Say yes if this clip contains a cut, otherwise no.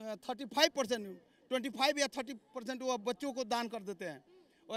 no